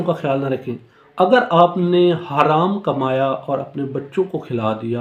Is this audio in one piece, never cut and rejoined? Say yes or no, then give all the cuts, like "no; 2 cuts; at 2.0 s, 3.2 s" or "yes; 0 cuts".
yes; 0 cuts